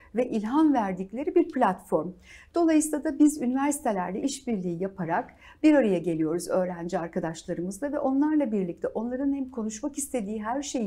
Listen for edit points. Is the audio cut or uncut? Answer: uncut